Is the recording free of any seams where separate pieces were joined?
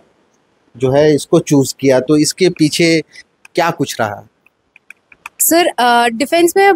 yes; 0 cuts

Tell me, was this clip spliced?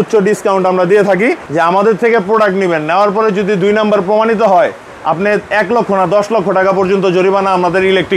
yes; 1 cut; at 1.4 s

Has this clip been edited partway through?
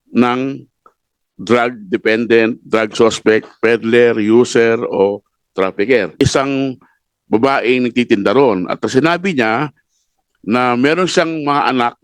yes; 1 cut; at 6.2 s

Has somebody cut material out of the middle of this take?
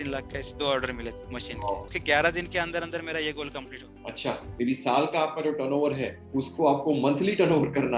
yes; 2 cuts; at 1.9 s, 4.5 s

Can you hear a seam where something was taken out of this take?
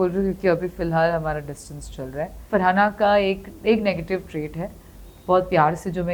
yes; 1 cut; at 2.5 s

